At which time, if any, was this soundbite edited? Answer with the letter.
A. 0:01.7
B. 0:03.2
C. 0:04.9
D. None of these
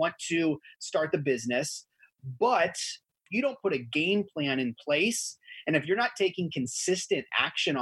B